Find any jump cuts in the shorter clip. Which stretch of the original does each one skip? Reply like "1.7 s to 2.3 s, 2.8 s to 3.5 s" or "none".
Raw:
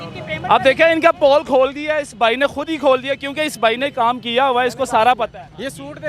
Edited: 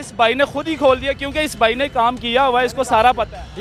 none